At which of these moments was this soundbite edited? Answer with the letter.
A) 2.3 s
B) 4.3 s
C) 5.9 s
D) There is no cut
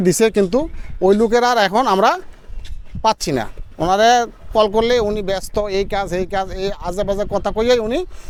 D